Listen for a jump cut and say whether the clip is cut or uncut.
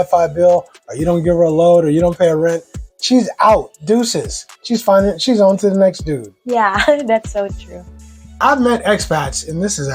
uncut